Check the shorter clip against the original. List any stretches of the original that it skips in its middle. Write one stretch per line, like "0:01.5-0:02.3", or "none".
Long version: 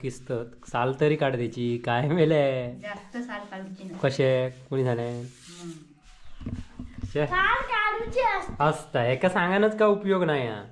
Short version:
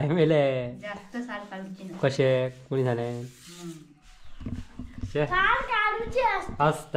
none